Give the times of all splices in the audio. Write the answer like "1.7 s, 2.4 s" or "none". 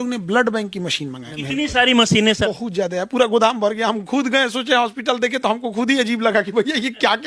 1.3 s, 2.4 s